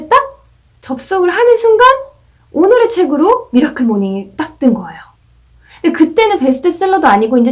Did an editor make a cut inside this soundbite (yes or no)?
no